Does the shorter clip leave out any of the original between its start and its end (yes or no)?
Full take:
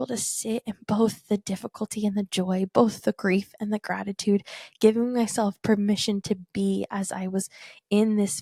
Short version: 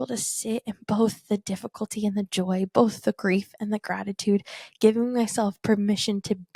no